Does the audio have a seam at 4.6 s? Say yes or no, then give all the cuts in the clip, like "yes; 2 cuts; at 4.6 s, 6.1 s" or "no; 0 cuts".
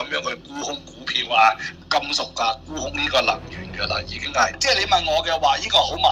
yes; 2 cuts; at 1.8 s, 4.6 s